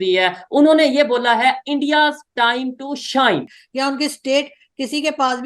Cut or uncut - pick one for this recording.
cut